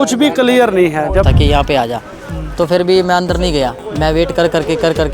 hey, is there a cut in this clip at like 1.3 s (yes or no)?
yes